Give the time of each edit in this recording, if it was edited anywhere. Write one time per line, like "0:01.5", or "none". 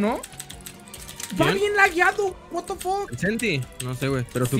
none